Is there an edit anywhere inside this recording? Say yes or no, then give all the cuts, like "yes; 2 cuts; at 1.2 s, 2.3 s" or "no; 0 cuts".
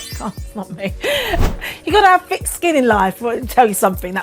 yes; 1 cut; at 1.4 s